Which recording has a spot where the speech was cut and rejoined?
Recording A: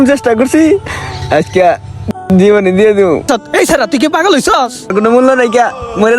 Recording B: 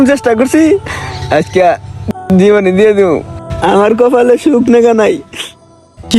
A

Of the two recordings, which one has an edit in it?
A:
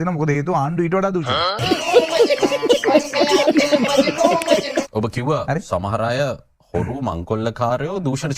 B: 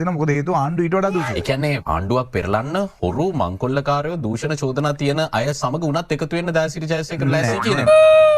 B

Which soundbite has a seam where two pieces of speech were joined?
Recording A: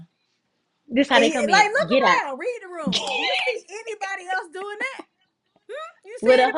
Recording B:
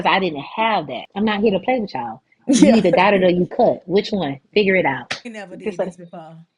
B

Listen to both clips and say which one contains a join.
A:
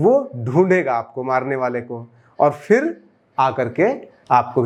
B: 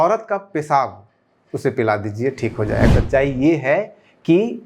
B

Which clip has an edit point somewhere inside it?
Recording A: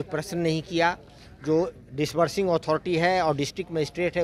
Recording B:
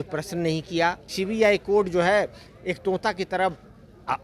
B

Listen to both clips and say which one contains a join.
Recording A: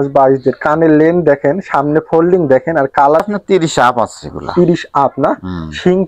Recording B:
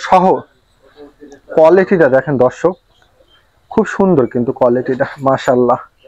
A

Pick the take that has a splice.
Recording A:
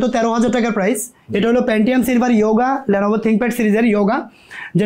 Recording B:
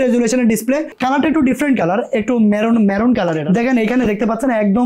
B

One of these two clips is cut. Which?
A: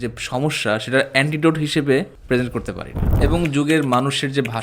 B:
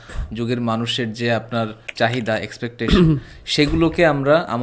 A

